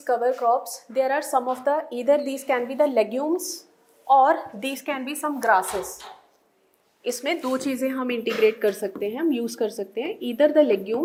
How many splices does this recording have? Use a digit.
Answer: 0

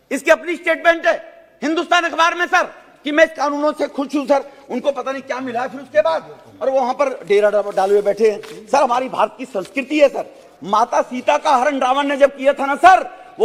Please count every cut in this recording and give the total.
0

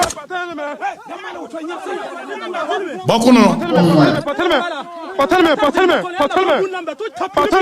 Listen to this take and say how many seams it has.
1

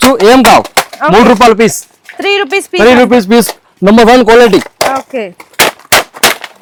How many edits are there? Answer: 0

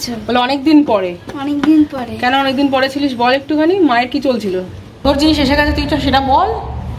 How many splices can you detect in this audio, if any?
1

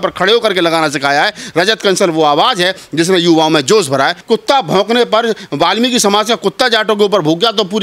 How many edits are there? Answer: 1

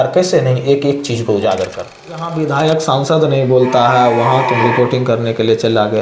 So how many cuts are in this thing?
1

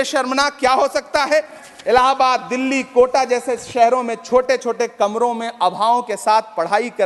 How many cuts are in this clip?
1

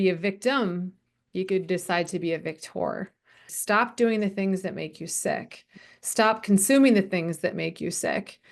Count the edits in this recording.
1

